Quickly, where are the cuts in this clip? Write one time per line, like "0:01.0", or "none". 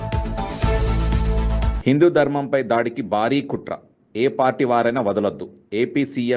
none